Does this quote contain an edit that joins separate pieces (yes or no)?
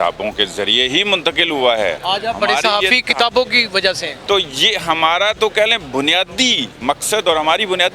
yes